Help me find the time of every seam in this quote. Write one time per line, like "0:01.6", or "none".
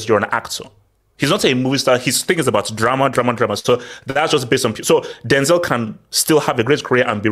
none

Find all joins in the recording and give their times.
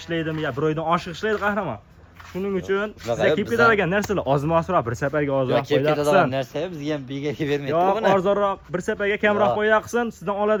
none

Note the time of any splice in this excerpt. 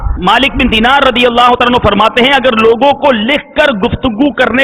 none

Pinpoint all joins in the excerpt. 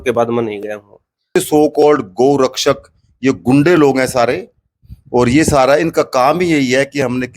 0:01.4

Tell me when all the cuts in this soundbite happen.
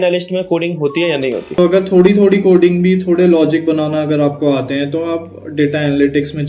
0:01.5

